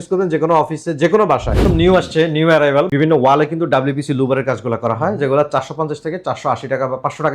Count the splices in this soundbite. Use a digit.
2